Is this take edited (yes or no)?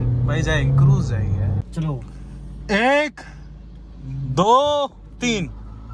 yes